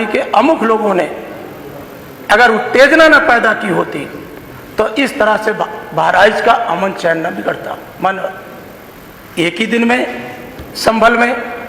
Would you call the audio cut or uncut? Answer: uncut